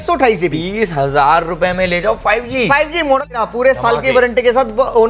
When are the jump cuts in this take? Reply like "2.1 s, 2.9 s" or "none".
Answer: 3.4 s